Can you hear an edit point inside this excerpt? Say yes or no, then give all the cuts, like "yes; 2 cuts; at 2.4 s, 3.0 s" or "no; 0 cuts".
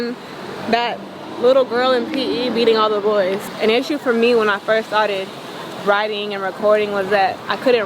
yes; 1 cut; at 3.5 s